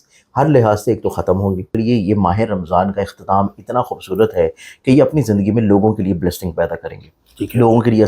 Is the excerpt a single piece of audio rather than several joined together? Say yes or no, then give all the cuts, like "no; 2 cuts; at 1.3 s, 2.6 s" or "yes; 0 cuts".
no; 1 cut; at 1.8 s